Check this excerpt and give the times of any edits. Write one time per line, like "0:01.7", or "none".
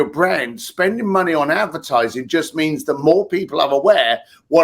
none